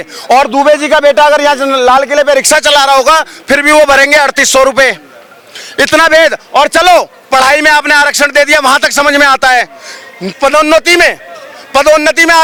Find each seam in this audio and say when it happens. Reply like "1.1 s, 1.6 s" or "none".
none